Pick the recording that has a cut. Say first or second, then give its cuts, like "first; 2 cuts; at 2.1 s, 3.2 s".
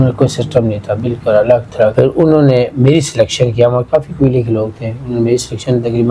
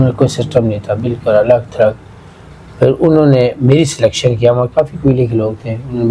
first; 1 cut; at 1.9 s